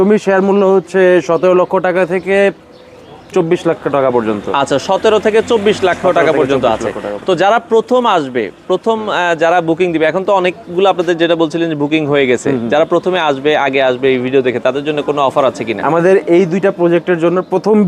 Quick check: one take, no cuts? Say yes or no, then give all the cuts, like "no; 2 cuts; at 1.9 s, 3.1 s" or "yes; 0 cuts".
yes; 0 cuts